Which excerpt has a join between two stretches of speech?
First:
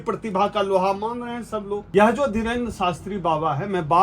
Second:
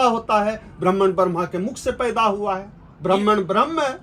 first; 1 cut; at 1.8 s

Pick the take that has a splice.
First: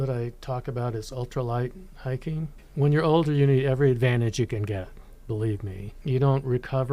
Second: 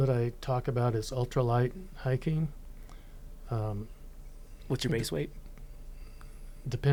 first; 2 cuts; at 2.6 s, 5.9 s

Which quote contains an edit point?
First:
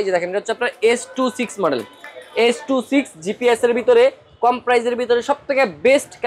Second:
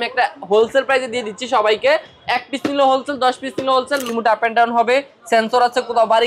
second; 1 cut; at 4.1 s

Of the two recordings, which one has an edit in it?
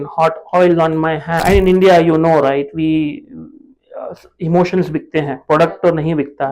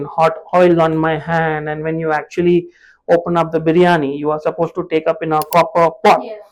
first; 1 cut; at 1.4 s

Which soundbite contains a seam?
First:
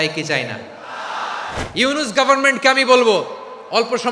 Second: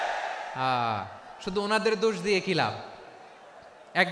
first; 1 cut; at 1.6 s

